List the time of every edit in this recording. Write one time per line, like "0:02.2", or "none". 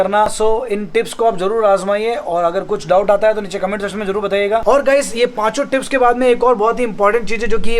0:04.6